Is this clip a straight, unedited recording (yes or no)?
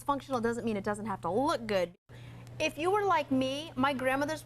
no